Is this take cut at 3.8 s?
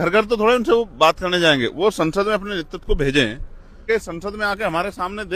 yes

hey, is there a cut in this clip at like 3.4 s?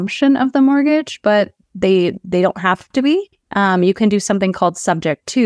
no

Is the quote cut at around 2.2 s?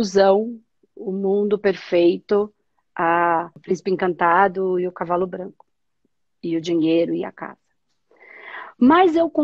no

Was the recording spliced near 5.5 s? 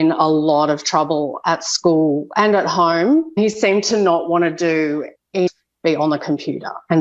yes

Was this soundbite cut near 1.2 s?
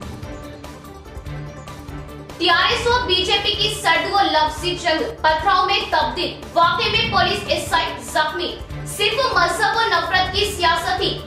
yes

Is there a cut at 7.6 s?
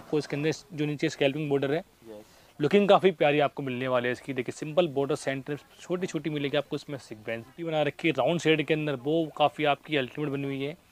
yes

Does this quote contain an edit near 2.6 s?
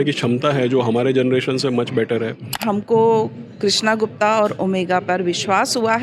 yes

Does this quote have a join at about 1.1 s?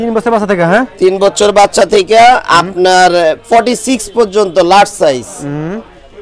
no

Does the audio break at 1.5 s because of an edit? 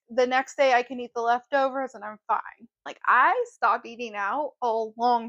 no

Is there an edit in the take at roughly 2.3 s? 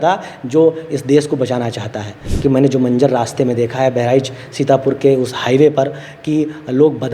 yes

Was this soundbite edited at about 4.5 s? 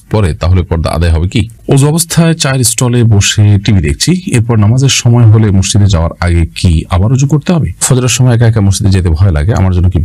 no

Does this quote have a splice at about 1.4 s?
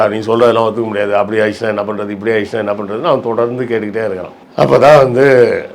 no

